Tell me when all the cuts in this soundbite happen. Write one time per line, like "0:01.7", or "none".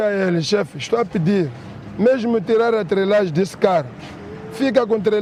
none